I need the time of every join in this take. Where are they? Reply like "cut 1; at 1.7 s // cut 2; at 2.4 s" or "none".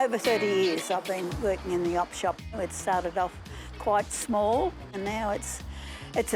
cut 1; at 2.6 s // cut 2; at 5.0 s